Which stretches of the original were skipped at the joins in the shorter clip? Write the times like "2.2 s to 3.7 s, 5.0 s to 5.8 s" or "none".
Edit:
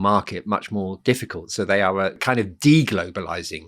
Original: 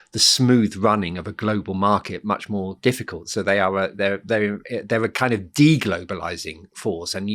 4.0 s to 5.1 s